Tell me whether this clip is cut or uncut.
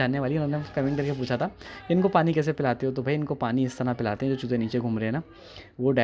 uncut